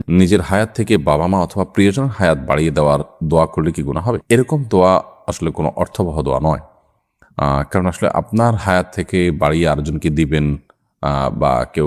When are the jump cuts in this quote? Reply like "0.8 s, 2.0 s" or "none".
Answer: none